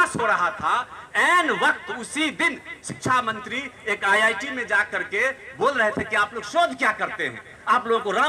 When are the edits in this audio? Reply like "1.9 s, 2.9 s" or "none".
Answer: none